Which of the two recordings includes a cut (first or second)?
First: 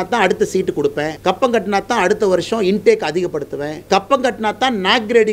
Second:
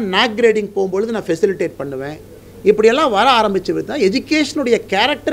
first